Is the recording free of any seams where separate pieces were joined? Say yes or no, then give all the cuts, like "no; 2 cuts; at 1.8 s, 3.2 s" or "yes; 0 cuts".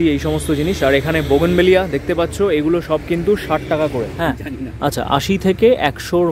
no; 1 cut; at 4.1 s